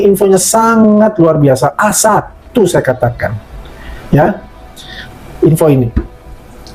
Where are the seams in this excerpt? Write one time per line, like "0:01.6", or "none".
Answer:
none